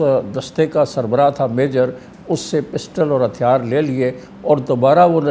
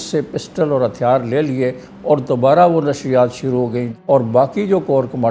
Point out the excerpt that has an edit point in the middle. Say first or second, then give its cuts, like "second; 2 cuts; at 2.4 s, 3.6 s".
second; 1 cut; at 3.9 s